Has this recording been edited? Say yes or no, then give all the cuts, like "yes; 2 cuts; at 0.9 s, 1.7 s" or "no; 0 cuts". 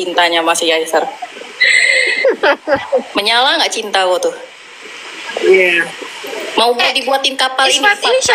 no; 0 cuts